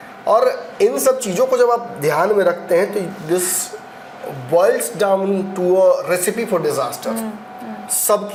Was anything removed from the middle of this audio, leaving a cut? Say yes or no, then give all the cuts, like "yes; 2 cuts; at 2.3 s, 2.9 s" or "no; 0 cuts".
no; 0 cuts